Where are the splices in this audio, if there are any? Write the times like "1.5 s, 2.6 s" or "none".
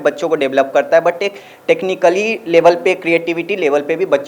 none